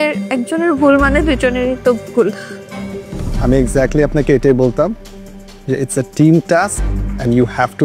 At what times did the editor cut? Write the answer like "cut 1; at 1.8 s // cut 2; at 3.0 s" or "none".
cut 1; at 3.0 s